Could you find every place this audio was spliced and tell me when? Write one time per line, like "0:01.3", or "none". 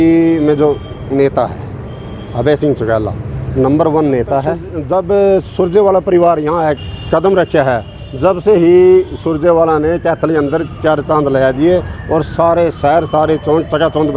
0:04.7
0:06.8